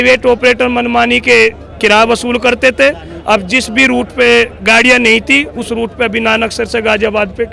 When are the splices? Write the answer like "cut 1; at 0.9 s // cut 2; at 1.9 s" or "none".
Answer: none